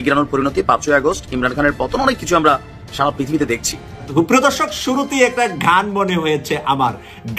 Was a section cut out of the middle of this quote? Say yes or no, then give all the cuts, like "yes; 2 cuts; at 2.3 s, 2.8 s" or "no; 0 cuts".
yes; 1 cut; at 4.1 s